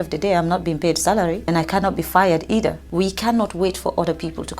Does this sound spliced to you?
yes; 2 cuts; at 1.5 s, 2.8 s

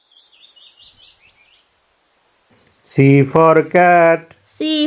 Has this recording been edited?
no; 0 cuts

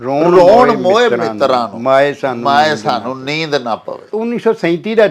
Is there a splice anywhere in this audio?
yes; 1 cut; at 4.1 s

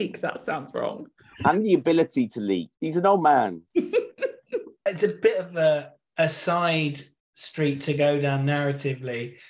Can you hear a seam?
no; 0 cuts

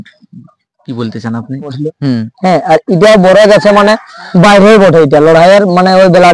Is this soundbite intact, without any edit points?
no; 1 cut; at 1.9 s

